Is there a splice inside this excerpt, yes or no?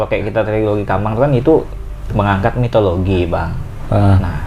no